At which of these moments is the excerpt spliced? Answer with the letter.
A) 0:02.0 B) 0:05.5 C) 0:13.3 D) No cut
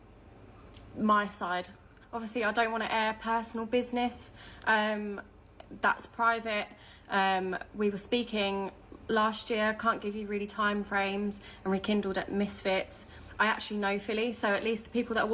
A